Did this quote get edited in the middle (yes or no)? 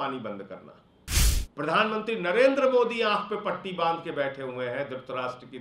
yes